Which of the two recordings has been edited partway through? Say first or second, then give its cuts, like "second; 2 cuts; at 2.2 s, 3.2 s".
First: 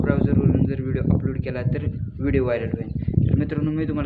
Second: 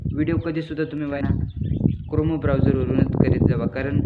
second; 1 cut; at 1.1 s